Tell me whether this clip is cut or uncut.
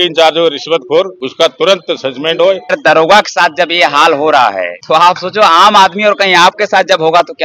cut